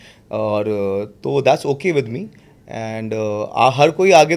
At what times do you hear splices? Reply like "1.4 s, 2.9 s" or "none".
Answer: none